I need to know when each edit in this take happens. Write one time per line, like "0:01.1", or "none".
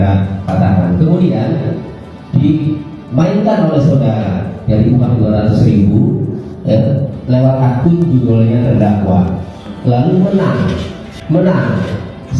0:11.1